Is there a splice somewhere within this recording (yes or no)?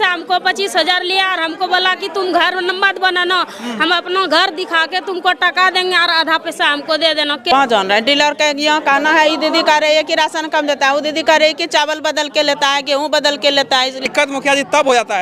yes